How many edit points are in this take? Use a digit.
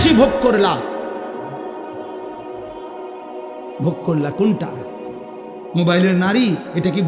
2